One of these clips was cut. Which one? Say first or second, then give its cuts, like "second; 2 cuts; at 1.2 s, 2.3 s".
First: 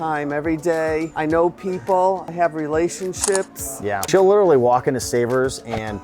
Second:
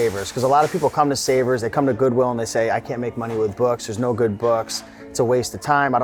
first; 3 cuts; at 1.1 s, 2.3 s, 4.1 s